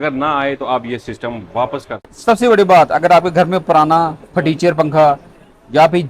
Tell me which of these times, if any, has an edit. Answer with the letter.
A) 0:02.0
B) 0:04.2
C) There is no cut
A